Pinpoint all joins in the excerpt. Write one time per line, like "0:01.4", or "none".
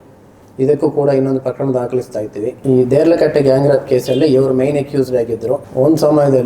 0:02.6
0:05.7